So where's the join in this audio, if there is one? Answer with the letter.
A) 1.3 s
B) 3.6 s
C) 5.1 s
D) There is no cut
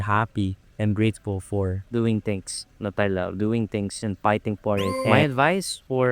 C